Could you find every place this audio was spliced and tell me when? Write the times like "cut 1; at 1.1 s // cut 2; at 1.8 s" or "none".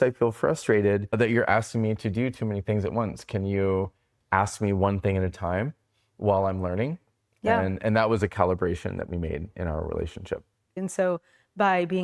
cut 1; at 1.1 s // cut 2; at 10.8 s